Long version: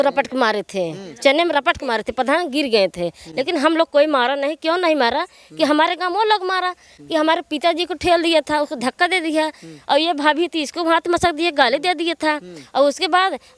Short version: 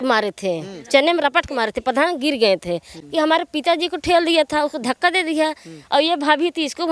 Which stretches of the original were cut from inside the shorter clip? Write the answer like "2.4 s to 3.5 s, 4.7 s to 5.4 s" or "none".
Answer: 3.2 s to 6.9 s